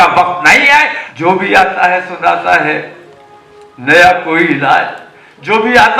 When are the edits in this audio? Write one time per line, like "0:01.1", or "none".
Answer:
0:01.0